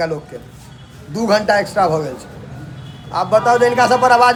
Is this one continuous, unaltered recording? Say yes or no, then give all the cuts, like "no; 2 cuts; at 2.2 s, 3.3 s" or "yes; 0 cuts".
yes; 0 cuts